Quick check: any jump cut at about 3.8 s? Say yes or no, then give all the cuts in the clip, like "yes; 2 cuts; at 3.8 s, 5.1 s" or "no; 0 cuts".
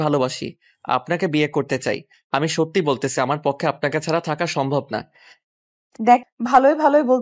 no; 2 cuts; at 2.1 s, 6.3 s